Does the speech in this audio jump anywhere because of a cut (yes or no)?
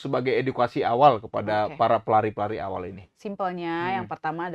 no